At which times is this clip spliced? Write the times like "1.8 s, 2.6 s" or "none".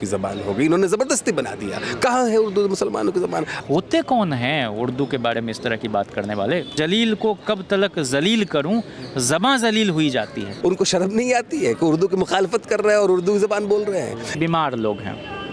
3.6 s, 6.7 s, 10.6 s, 14.4 s